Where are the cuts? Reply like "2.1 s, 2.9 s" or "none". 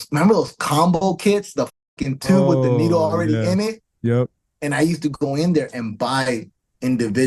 none